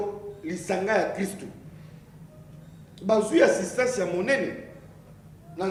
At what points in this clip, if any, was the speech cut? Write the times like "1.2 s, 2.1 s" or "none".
none